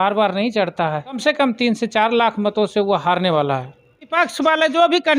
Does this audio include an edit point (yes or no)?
yes